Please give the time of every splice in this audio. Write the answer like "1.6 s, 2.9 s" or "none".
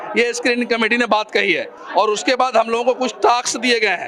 none